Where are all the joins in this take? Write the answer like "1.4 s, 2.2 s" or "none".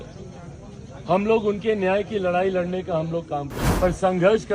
3.6 s